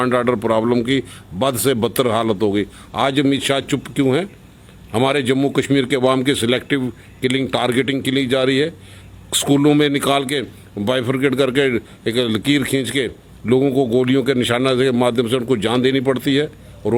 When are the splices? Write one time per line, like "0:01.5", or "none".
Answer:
none

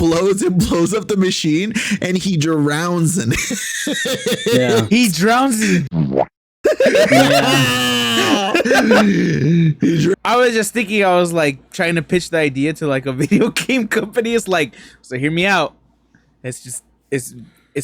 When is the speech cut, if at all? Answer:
0:10.2

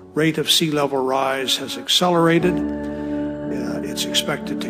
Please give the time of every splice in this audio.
0:02.6

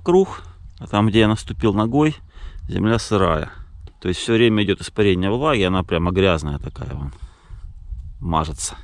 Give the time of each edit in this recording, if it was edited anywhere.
none

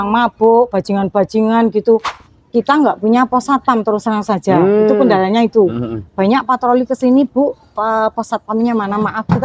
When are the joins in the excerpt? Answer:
0:02.1

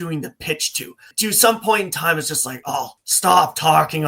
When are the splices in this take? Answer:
0:01.1
0:03.0

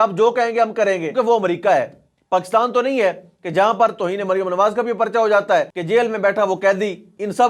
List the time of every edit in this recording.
0:01.1
0:05.8

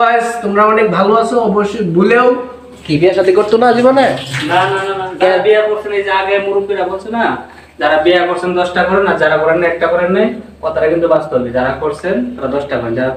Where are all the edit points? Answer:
none

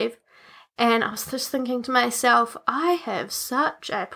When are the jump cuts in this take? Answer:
none

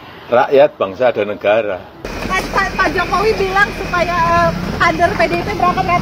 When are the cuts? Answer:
0:02.1

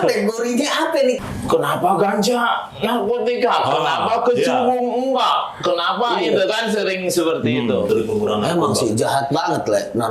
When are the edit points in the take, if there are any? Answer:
0:01.2
0:07.9

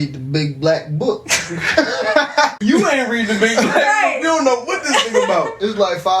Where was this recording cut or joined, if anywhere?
0:02.6

